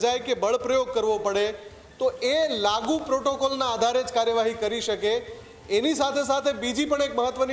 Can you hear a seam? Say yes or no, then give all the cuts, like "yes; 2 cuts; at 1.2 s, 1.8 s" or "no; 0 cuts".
no; 0 cuts